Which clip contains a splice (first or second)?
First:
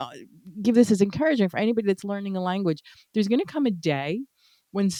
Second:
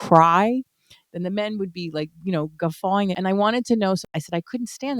second